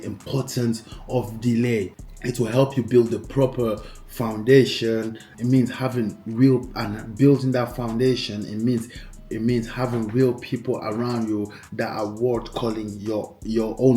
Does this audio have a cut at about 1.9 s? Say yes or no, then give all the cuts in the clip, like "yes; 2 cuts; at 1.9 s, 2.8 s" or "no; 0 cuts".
yes; 1 cut; at 1.9 s